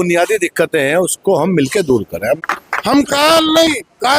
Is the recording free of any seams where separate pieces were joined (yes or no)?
no